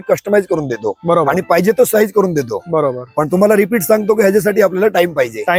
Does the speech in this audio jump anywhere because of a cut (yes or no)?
no